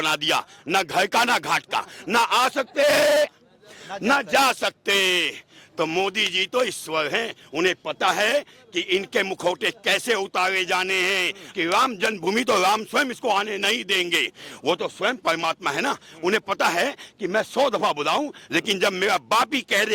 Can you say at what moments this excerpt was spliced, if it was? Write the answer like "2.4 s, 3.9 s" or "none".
11.4 s